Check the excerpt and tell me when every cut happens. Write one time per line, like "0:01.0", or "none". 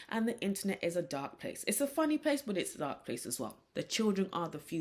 0:03.6